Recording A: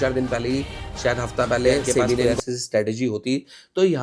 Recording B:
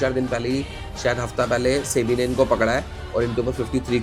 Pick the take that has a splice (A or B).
A